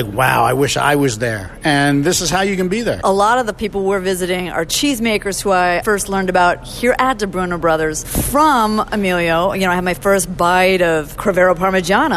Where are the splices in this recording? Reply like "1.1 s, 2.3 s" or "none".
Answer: 3.0 s, 4.7 s, 5.8 s, 8.1 s